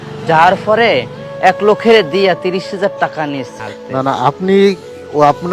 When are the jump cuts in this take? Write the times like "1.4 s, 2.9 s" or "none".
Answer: 3.5 s